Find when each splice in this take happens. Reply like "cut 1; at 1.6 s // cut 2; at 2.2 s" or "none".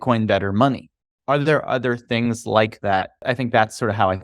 cut 1; at 1.0 s // cut 2; at 3.2 s